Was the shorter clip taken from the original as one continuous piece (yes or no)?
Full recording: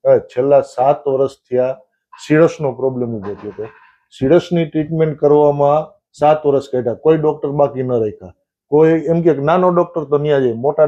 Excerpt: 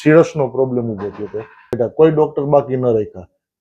no